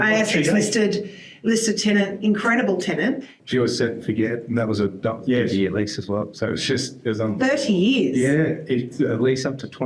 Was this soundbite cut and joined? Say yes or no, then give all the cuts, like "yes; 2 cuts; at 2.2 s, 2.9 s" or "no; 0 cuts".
yes; 1 cut; at 3.3 s